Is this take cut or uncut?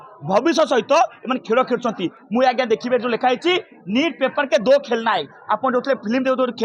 uncut